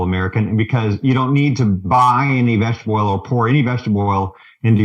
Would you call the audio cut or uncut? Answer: uncut